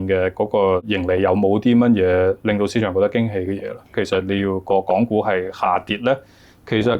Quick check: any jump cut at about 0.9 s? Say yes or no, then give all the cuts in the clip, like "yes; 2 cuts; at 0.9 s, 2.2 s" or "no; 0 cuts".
yes; 2 cuts; at 0.9 s, 4.0 s